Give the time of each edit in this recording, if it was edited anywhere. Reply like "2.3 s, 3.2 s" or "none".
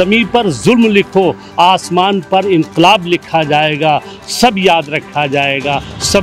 none